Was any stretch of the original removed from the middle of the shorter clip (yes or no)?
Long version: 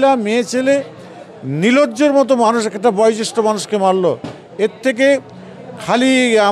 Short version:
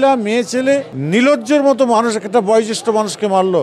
yes